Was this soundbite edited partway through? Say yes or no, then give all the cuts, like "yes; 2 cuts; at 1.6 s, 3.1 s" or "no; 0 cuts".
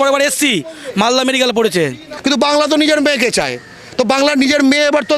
yes; 1 cut; at 2.1 s